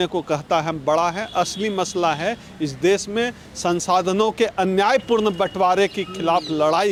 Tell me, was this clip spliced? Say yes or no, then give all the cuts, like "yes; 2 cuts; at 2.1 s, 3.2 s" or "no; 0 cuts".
no; 0 cuts